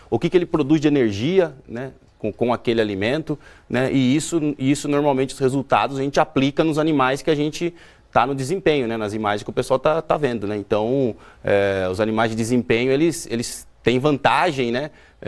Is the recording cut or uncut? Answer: uncut